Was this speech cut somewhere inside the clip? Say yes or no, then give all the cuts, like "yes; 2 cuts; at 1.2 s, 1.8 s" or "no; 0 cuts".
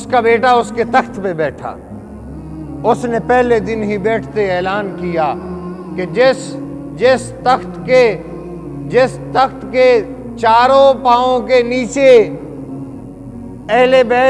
no; 0 cuts